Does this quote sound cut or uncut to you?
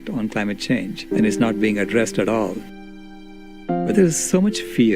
cut